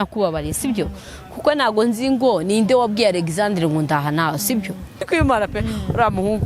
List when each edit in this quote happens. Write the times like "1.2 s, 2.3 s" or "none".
5.1 s